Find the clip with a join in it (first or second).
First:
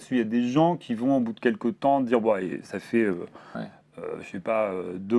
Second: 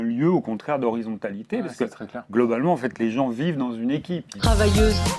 second